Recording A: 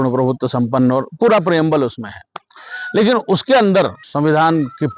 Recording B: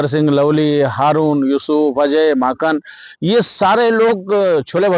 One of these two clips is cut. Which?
A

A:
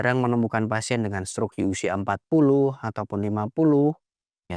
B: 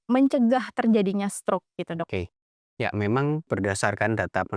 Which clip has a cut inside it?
B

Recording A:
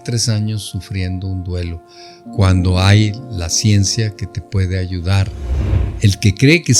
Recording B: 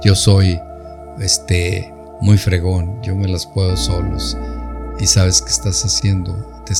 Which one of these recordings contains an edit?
A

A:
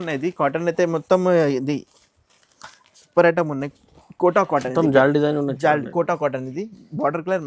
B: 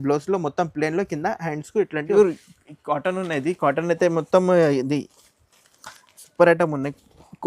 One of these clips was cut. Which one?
B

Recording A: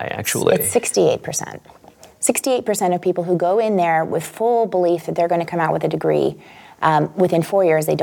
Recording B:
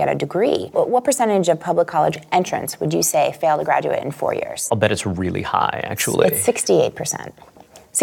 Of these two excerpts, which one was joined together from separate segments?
B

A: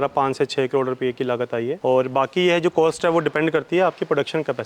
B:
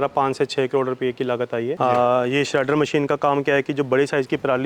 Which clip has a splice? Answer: B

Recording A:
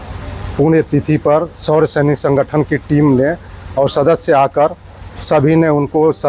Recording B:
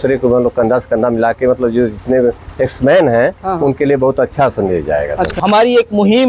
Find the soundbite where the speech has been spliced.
B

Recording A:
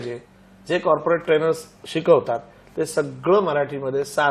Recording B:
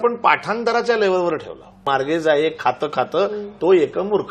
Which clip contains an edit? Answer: B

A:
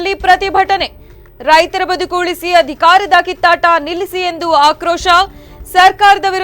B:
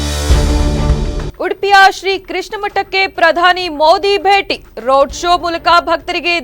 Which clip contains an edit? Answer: B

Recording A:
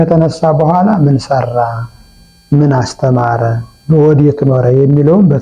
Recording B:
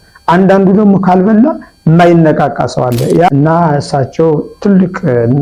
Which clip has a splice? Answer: B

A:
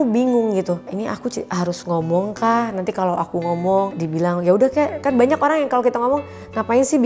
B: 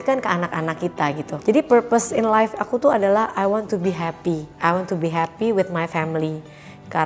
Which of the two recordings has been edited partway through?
B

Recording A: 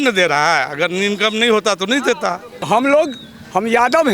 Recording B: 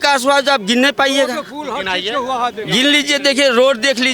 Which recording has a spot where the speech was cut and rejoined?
A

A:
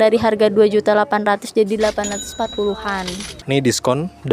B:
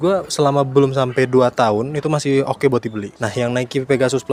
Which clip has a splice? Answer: A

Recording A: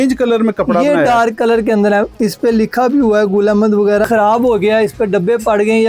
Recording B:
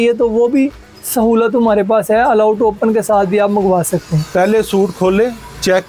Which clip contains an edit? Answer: A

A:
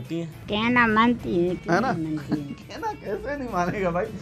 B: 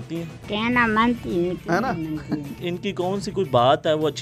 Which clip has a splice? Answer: B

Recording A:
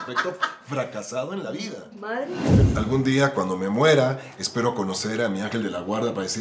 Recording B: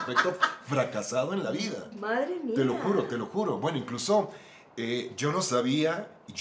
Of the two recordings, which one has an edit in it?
A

